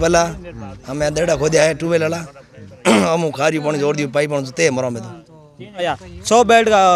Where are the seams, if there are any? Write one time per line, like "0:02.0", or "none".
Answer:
0:06.0